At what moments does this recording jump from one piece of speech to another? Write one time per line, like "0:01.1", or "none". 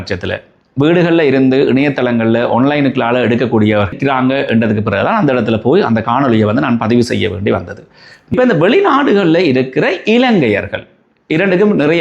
0:03.9
0:08.3